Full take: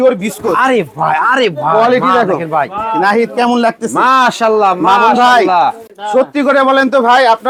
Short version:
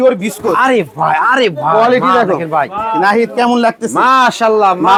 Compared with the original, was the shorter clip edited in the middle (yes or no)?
no